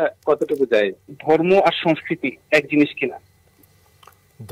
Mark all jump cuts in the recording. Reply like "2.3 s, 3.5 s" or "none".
1.0 s